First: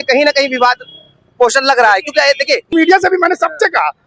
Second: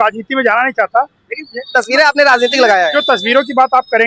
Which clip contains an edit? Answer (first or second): first